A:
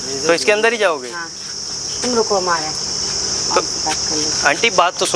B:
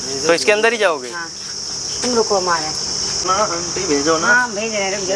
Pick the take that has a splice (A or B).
B